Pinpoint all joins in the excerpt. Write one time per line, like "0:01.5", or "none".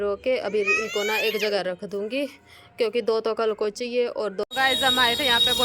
0:04.4